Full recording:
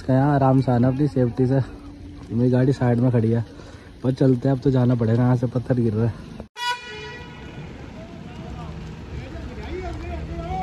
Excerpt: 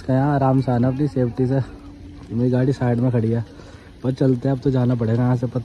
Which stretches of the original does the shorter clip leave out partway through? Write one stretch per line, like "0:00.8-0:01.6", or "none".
none